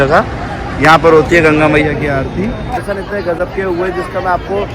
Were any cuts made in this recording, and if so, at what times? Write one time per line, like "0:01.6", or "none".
0:02.8